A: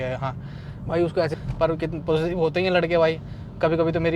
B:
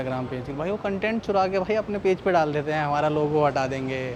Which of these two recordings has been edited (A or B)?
A